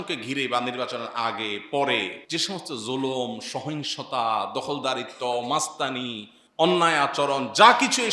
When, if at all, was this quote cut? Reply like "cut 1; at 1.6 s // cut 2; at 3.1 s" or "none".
cut 1; at 2.2 s